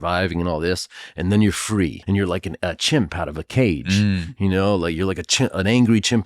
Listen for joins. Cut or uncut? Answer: cut